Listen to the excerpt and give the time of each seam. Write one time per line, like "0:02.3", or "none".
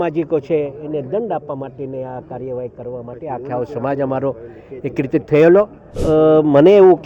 0:05.9

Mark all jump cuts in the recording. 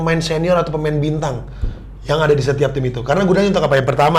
none

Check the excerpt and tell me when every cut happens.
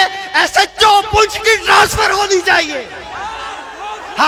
none

